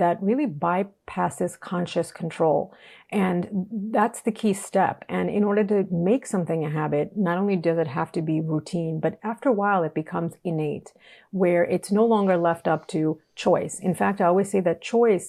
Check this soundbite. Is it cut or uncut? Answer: uncut